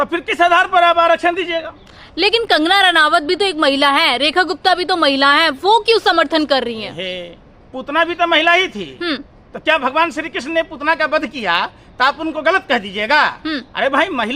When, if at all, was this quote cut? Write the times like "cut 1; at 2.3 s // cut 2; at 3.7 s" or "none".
none